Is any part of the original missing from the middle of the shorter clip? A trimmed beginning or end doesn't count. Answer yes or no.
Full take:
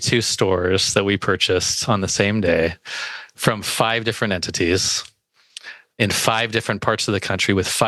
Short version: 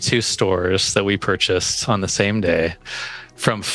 no